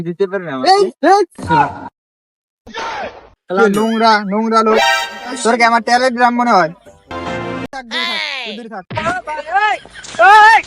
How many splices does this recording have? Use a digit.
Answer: 1